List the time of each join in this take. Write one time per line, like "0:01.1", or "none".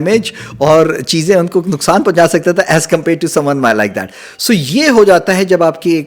none

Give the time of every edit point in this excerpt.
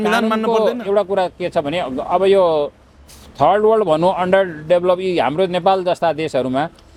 none

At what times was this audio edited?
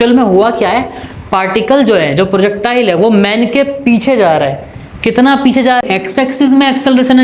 0:05.8

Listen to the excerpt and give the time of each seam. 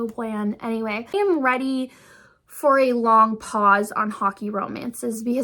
0:01.1

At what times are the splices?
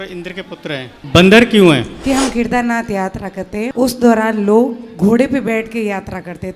0:01.0
0:01.9
0:03.7

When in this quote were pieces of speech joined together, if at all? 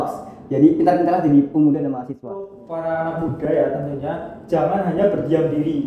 0:02.5

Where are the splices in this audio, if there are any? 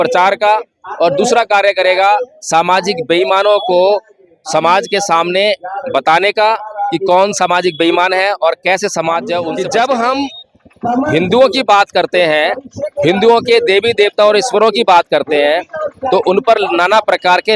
0:09.5

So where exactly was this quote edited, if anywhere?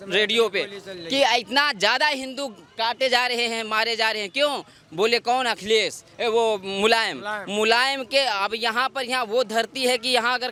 none

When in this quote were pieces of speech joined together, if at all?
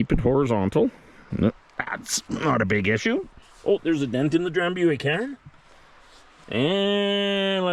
none

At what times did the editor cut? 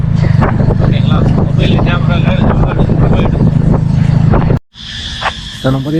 none

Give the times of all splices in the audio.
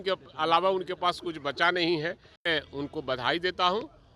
0:02.3

